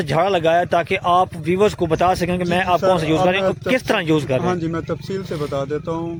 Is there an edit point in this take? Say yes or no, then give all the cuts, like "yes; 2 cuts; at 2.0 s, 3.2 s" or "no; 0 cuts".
no; 0 cuts